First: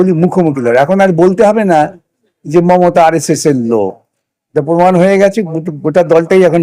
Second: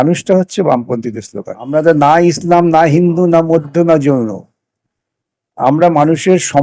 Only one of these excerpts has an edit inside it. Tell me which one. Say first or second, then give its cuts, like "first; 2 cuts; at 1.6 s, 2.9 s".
second; 1 cut; at 1.7 s